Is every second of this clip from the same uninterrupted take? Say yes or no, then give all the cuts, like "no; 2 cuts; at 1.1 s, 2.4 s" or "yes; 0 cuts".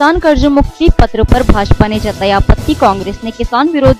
yes; 0 cuts